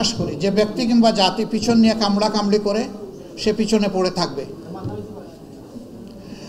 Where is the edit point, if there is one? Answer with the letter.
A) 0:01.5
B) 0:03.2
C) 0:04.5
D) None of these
D